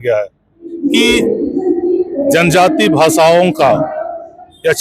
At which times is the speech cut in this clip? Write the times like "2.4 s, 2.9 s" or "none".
2.2 s